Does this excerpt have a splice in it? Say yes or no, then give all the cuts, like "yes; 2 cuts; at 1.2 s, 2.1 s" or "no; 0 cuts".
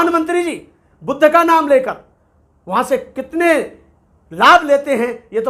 no; 0 cuts